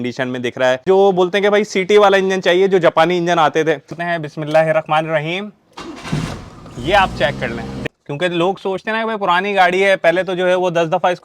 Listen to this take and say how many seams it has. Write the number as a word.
three